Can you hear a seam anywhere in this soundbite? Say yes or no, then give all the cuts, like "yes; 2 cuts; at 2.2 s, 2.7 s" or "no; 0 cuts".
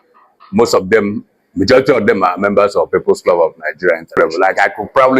yes; 1 cut; at 4.3 s